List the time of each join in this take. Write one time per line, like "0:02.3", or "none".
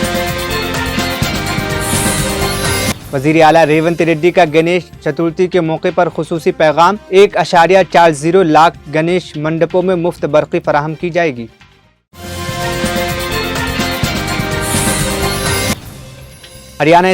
0:03.0